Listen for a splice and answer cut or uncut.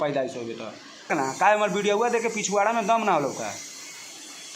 cut